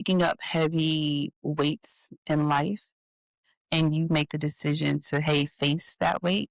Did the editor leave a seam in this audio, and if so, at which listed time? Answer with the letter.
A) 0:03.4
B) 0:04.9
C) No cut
A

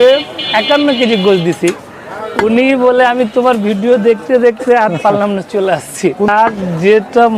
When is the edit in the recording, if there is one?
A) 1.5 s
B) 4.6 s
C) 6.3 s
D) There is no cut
C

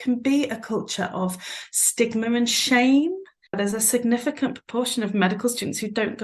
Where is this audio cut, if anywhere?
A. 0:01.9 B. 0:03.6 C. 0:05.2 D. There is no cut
B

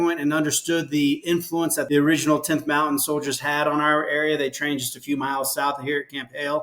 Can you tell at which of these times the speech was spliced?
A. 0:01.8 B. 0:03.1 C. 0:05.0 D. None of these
A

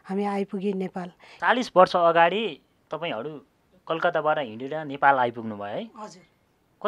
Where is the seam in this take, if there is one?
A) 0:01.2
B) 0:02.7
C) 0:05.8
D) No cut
A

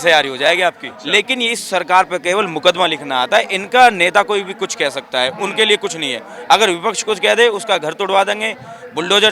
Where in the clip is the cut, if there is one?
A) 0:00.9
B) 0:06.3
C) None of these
A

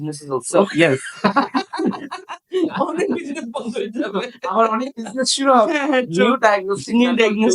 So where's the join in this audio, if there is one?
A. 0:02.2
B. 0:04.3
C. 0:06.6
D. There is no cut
D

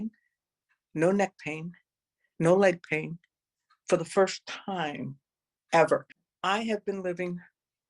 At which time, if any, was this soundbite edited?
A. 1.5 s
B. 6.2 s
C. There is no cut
B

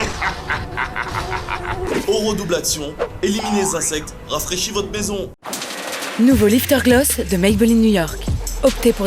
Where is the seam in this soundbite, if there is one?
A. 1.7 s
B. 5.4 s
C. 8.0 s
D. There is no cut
B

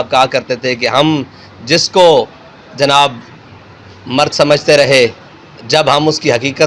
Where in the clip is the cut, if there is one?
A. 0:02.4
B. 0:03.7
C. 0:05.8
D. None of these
D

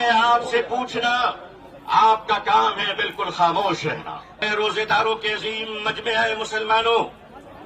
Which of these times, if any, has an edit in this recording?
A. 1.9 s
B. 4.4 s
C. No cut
B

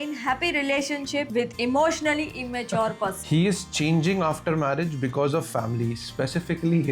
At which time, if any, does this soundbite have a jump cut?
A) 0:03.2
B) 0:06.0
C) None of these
A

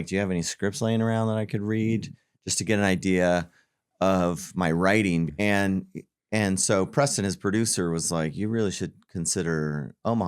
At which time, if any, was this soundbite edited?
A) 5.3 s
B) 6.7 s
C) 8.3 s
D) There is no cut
A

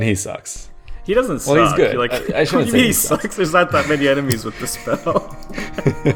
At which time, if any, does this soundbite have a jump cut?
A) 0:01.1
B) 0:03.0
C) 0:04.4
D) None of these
D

